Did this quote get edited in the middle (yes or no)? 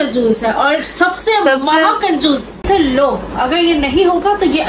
yes